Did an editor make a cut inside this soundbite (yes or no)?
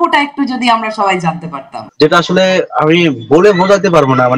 yes